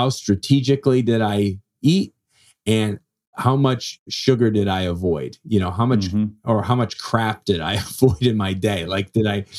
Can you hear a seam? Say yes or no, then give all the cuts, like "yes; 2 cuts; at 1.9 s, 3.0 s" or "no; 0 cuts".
no; 0 cuts